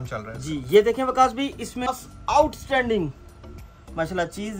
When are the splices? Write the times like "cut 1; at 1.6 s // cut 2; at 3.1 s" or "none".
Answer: cut 1; at 1.9 s